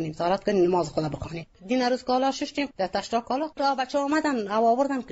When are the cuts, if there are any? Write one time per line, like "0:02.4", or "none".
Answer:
0:03.5